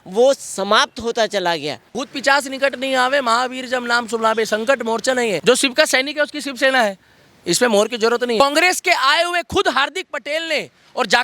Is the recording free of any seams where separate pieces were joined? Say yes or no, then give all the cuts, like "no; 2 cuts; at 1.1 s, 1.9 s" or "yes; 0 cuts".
no; 3 cuts; at 1.9 s, 5.4 s, 8.4 s